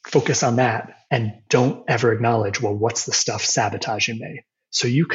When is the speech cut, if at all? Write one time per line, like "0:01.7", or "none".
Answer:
0:00.9